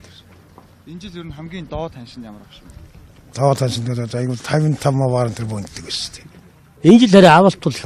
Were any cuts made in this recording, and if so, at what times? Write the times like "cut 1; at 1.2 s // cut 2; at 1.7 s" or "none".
cut 1; at 4.6 s